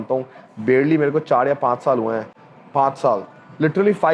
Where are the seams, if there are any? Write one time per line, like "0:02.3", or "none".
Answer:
none